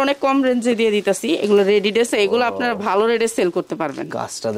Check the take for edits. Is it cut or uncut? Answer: cut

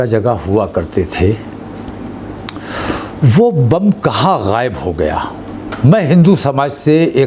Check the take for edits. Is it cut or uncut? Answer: uncut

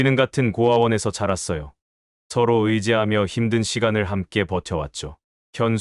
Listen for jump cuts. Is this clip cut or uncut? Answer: uncut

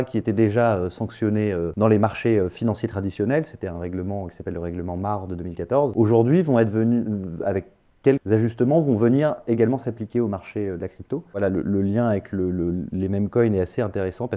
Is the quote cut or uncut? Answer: cut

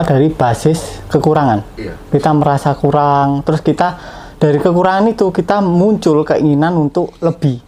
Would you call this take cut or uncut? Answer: uncut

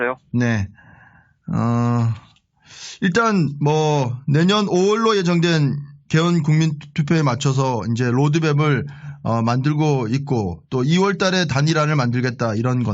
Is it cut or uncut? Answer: cut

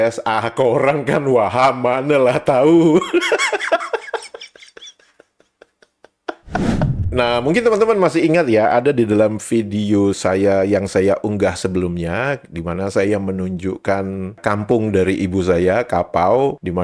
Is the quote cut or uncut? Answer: uncut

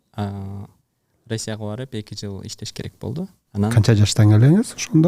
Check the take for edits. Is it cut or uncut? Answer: cut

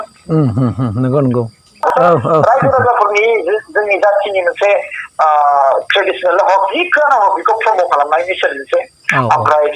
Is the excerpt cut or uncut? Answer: cut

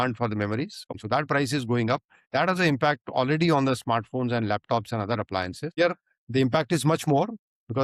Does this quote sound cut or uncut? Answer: cut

